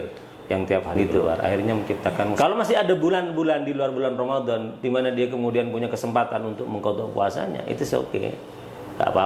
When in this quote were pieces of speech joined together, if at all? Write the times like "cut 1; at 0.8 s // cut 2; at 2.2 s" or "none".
cut 1; at 2.4 s